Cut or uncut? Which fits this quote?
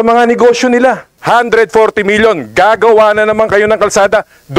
cut